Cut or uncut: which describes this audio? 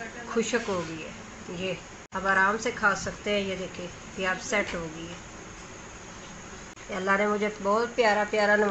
cut